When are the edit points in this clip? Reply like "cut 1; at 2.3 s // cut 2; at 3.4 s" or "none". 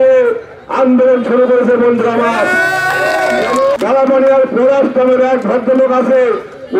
cut 1; at 3.8 s